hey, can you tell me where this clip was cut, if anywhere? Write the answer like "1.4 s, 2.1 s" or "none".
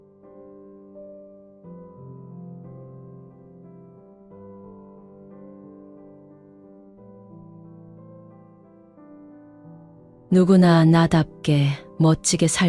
none